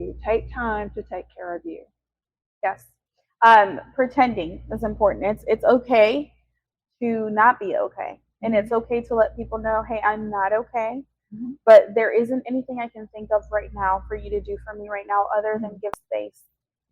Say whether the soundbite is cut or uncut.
cut